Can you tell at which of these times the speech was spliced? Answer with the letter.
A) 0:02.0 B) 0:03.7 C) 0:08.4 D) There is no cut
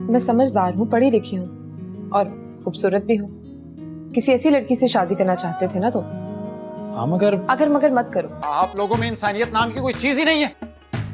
C